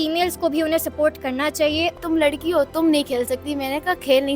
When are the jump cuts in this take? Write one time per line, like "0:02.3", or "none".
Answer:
0:02.0